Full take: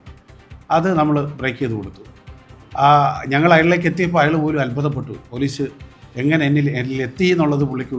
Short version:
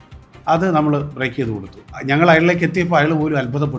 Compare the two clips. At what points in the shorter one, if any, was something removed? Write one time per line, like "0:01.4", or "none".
0:02.0

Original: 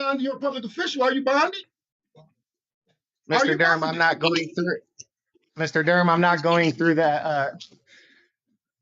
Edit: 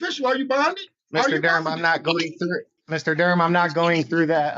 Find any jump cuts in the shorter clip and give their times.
0:00.9
0:02.7

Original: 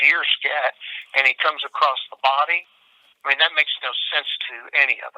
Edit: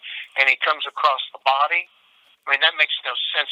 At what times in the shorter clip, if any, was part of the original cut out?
none

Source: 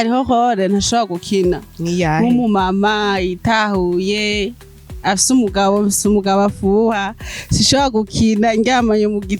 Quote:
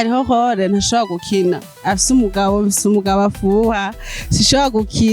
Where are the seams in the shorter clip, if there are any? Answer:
0:01.7

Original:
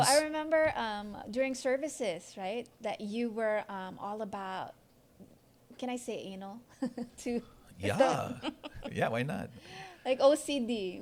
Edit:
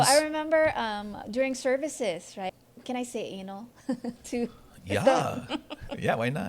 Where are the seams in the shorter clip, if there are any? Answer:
0:02.5

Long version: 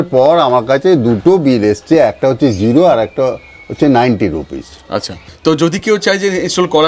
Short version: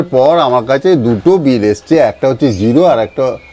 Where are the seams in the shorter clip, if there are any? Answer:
none

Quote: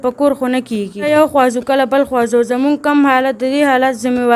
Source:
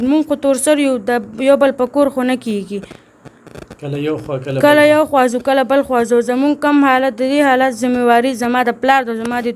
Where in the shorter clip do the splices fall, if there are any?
0:01.1

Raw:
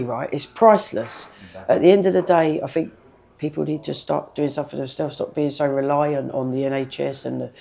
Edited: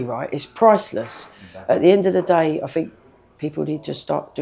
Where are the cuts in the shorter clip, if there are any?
none

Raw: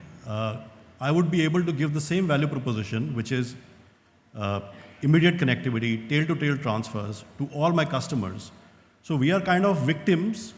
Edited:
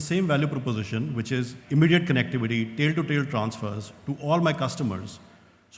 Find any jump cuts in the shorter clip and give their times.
0:01.6

